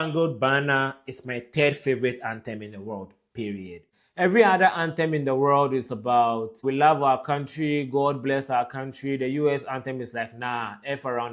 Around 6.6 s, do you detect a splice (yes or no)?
yes